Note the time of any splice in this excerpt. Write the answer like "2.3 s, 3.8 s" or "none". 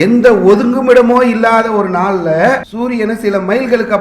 2.7 s